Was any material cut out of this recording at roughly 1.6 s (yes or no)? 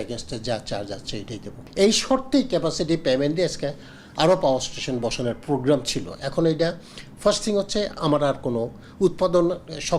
yes